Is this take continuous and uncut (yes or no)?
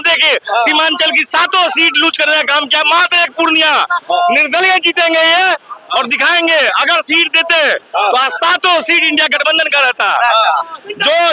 yes